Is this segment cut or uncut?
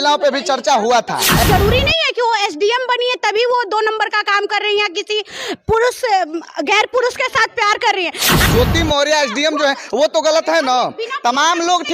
cut